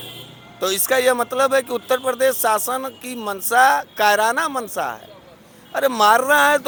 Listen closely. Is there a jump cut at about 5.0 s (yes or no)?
no